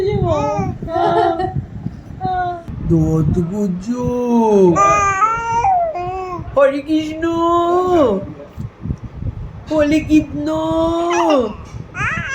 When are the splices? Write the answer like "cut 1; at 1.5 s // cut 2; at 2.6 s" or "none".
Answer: cut 1; at 2.7 s